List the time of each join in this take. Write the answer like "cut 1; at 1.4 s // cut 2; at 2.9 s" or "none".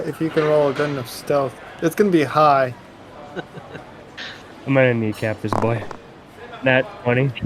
cut 1; at 4.5 s